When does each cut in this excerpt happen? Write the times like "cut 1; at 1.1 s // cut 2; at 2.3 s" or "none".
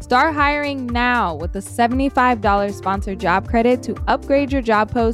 none